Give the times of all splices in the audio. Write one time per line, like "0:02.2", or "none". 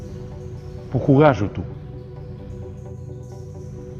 0:00.9
0:01.8